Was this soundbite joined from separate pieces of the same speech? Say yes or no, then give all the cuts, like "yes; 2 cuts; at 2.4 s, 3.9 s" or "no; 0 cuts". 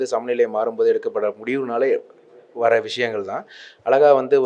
no; 0 cuts